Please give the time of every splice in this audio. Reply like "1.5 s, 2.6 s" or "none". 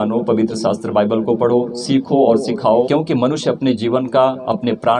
2.9 s